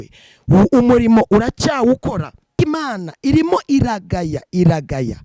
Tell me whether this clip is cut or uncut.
cut